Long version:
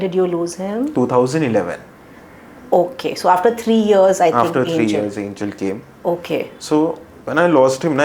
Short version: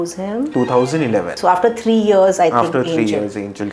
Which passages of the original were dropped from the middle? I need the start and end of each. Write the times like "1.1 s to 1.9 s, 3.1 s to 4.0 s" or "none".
1.8 s to 3.2 s